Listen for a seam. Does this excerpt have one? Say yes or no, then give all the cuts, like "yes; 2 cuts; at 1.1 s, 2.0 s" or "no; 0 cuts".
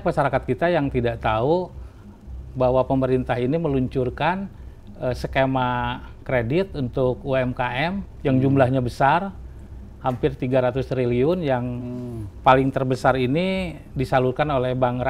no; 0 cuts